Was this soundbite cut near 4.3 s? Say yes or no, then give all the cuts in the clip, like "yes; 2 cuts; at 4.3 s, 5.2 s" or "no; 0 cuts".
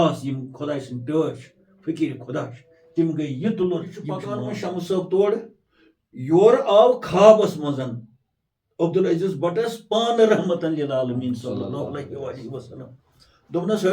yes; 1 cut; at 4.3 s